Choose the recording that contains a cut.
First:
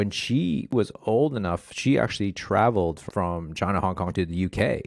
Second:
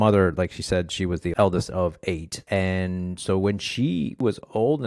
first; 2 cuts; at 3.0 s, 4.1 s

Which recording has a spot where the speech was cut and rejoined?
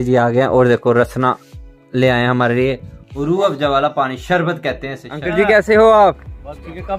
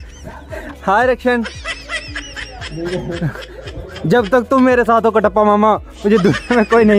first; 1 cut; at 5.2 s

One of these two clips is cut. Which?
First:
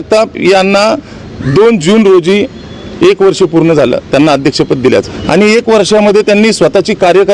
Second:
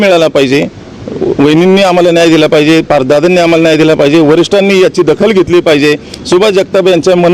first; 1 cut; at 5.2 s

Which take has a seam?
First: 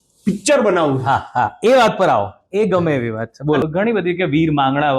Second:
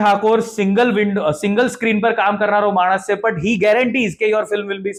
first; 1 cut; at 3.7 s

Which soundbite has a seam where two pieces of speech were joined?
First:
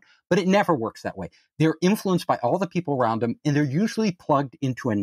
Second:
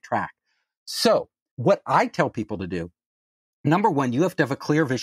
second; 1 cut; at 1.5 s

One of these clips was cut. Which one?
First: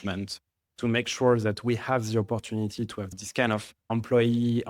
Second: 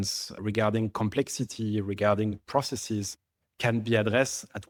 first; 2 cuts; at 3.1 s, 3.7 s

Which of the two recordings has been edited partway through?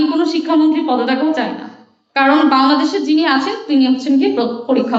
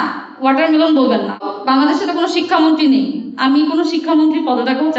second; 1 cut; at 1.5 s

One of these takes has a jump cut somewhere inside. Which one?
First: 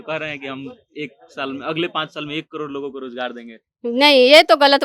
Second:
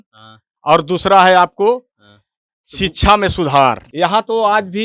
second; 1 cut; at 3.9 s

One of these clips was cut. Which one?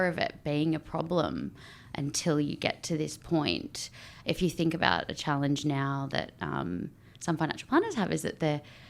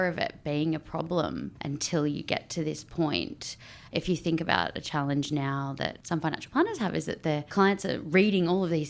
second; 3 cuts; at 1.5 s, 6.0 s, 7.5 s

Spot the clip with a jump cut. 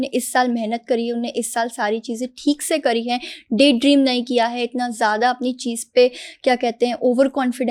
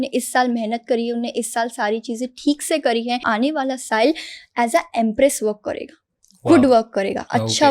second; 1 cut; at 3.3 s

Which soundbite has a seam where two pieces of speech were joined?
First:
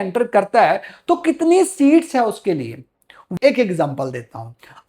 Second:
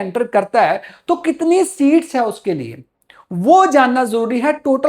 first; 1 cut; at 3.3 s

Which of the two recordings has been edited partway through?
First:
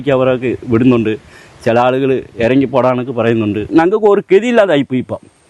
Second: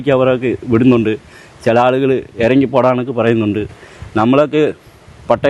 first; 1 cut; at 3.7 s

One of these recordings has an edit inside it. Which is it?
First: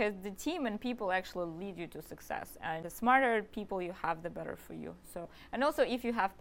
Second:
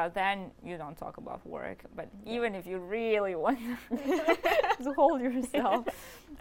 first; 2 cuts; at 2.9 s, 5.3 s

